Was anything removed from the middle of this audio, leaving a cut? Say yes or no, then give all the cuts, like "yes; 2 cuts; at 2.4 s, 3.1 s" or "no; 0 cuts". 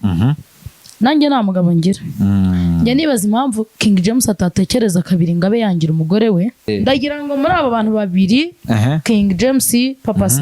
yes; 1 cut; at 6.6 s